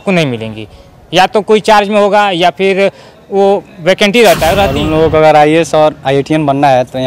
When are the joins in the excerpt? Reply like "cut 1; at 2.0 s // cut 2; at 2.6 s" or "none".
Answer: cut 1; at 4.8 s

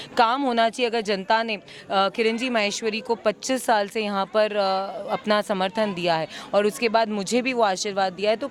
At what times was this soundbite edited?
none

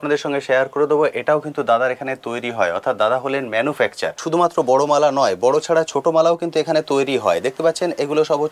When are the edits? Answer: cut 1; at 4.2 s

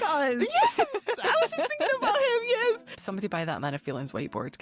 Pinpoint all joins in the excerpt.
cut 1; at 3.0 s

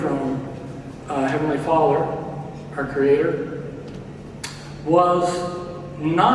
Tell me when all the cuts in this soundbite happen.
none

